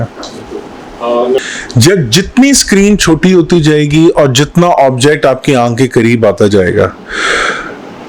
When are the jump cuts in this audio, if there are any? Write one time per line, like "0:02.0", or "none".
0:01.4

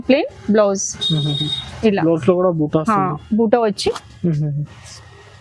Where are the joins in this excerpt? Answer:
none

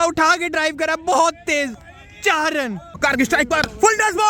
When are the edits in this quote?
0:03.0

